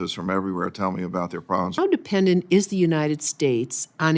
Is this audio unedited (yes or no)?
no